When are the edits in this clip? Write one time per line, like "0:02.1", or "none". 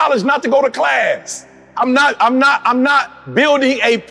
0:01.6